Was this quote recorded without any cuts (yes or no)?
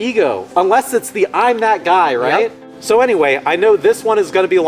no